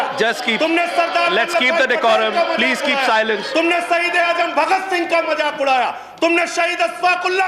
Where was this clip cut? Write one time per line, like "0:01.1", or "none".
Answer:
none